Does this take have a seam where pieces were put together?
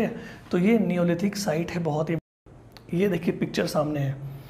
yes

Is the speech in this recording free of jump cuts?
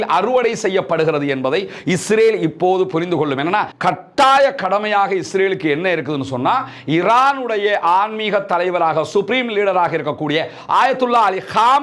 no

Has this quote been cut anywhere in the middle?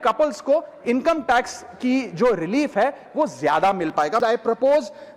yes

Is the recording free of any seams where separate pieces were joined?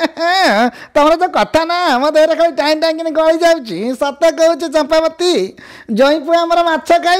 yes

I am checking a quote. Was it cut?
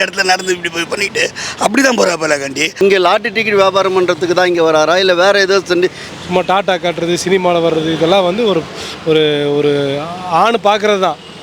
yes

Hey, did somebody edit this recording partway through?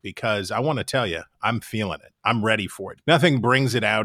yes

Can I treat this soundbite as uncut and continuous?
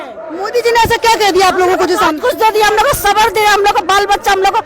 yes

